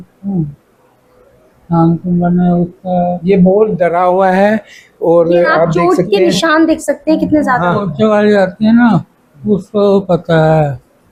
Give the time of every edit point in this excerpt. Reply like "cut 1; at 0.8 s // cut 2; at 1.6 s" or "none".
none